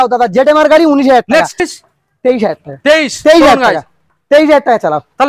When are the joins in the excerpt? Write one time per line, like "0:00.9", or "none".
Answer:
0:01.7